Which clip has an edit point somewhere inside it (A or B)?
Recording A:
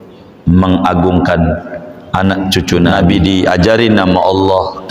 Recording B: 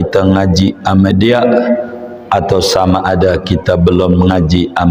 A